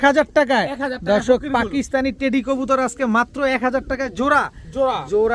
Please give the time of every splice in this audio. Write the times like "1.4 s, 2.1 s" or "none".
none